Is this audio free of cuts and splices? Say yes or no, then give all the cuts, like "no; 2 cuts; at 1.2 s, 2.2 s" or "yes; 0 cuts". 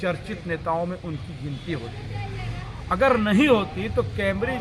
yes; 0 cuts